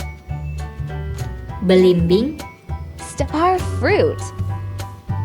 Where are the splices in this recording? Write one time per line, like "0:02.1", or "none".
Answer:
0:01.6
0:04.2